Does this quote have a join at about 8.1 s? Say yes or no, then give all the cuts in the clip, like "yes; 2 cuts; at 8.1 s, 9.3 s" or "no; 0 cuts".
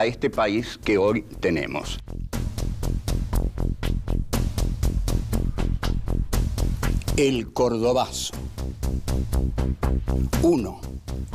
yes; 1 cut; at 8.1 s